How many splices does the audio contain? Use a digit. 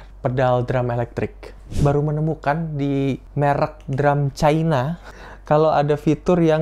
3